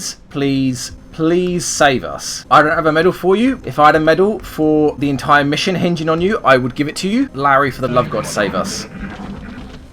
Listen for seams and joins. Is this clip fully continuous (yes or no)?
no